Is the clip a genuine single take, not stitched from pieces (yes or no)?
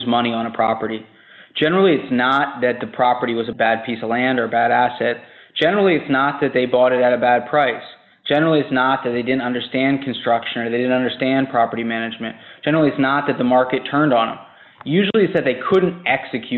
yes